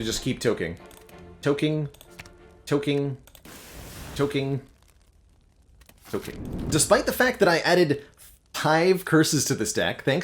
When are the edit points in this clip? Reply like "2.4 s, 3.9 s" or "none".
6.6 s